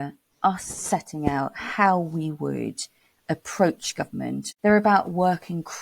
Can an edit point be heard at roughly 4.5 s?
yes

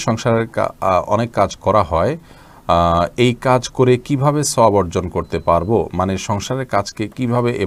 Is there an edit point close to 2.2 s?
no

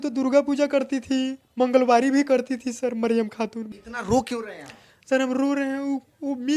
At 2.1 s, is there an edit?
no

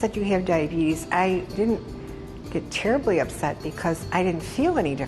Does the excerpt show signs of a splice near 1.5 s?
yes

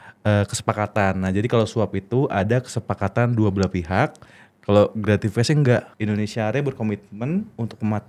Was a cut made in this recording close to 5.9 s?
yes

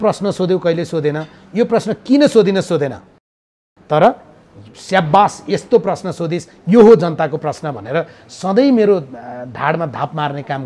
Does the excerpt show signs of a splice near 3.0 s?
no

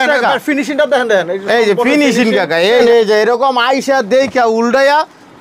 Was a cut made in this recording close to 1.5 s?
no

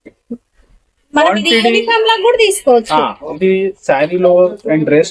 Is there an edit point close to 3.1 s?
no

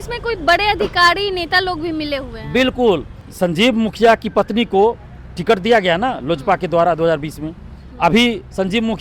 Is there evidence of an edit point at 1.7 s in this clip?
no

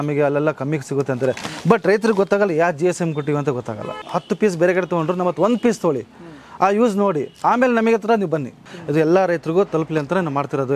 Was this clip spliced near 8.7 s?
yes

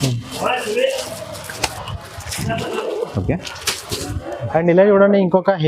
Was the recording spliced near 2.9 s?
no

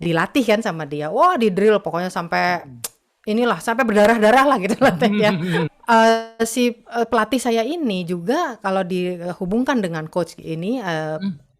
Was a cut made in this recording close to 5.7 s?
yes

